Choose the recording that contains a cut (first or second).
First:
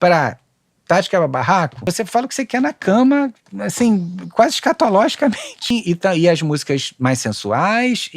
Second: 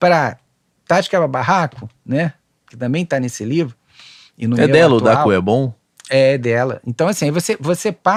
first